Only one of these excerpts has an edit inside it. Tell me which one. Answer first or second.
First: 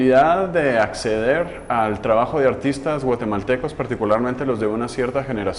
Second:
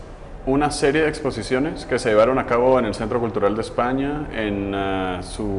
second